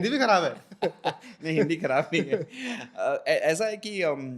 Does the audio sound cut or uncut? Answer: uncut